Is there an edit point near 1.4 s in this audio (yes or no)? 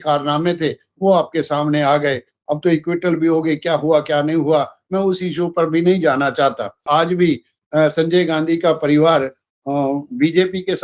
no